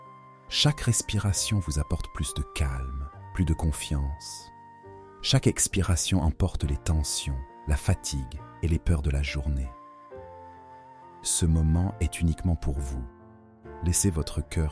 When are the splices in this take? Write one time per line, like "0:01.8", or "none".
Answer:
0:09.7
0:11.4